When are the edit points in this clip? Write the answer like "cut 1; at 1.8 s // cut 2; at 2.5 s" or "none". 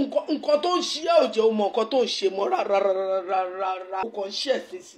cut 1; at 4.0 s